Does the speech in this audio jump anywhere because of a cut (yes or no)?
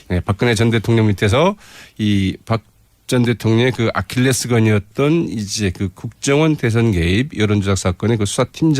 yes